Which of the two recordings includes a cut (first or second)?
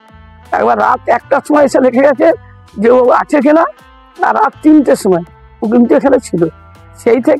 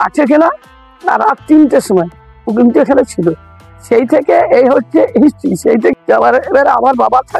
second